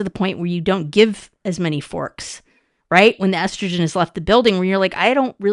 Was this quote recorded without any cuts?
yes; 0 cuts

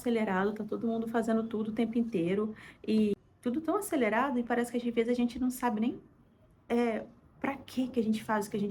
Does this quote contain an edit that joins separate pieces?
no; 0 cuts

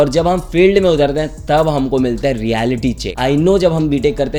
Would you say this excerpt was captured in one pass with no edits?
yes; 0 cuts

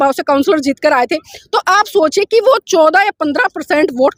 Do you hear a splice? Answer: no; 0 cuts

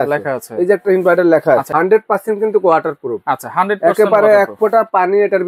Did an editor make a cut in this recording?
yes; 1 cut; at 1.7 s

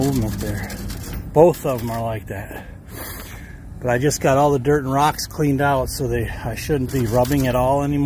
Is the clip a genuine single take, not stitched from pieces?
yes; 0 cuts

